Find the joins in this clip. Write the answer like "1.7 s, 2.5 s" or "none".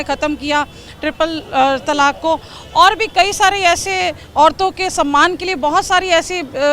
none